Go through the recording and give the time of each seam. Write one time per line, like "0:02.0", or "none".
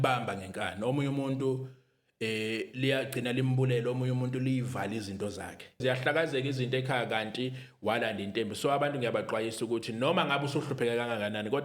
0:05.8